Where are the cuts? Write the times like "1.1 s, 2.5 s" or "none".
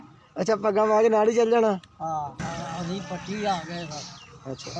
2.4 s